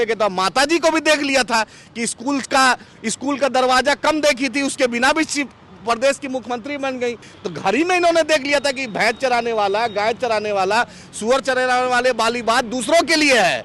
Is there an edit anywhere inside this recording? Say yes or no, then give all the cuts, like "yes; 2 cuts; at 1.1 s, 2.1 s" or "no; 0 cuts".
yes; 1 cut; at 7.3 s